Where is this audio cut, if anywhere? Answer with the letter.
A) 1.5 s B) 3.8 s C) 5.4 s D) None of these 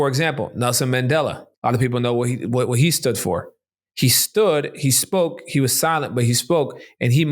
A